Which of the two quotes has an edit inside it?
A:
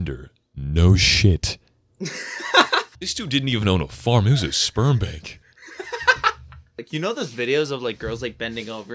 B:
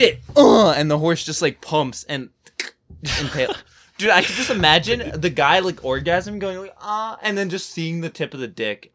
A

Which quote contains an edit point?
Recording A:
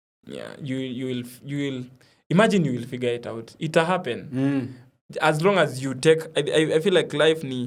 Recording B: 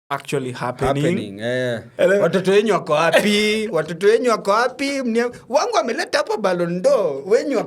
B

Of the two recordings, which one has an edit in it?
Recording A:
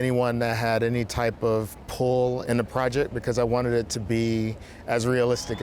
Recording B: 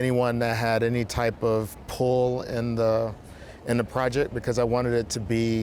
A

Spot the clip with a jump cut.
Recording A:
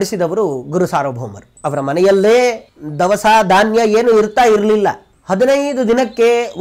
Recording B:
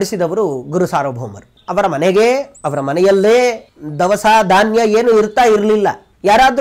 A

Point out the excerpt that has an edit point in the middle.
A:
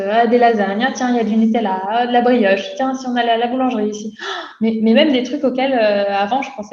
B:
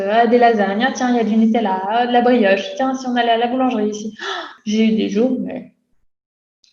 B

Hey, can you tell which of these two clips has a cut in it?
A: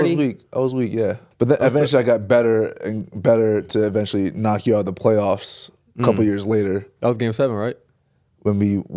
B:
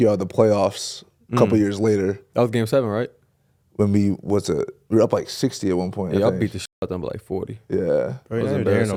A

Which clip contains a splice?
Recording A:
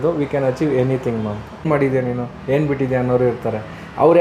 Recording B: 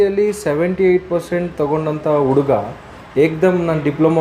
A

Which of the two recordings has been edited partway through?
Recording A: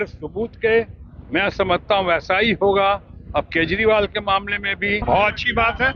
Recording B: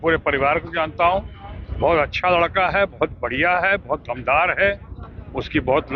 A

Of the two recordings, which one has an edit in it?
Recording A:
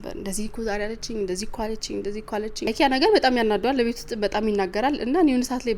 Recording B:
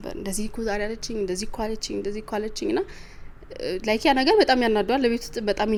A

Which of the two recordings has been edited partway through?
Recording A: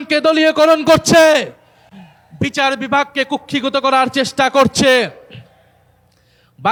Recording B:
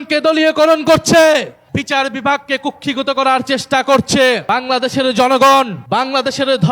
B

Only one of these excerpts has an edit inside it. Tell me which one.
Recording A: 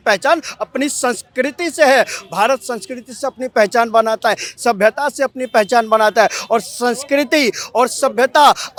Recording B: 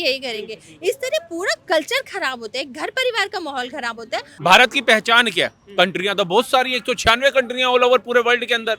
B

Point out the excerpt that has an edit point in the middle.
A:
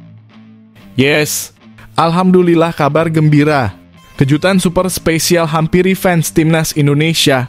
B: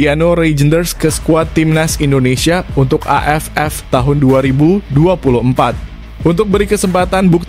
A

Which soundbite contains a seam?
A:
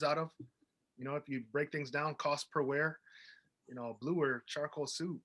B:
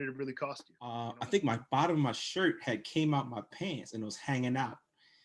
B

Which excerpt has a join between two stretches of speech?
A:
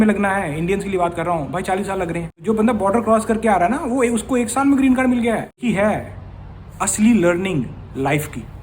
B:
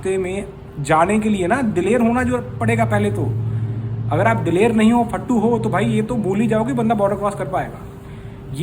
A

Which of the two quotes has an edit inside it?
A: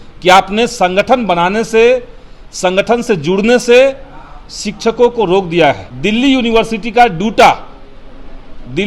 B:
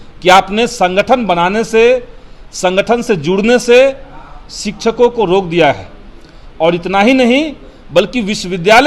A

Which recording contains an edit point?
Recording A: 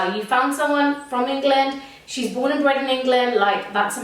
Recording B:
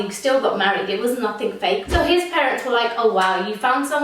B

